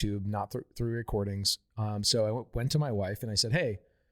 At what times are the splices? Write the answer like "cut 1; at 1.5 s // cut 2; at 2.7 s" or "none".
none